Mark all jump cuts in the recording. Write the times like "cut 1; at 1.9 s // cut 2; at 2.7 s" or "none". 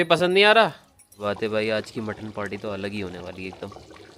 cut 1; at 1.2 s